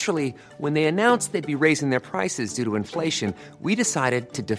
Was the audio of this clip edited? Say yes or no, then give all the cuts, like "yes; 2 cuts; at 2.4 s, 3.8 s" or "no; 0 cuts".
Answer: no; 0 cuts